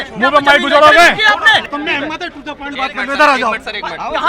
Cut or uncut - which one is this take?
cut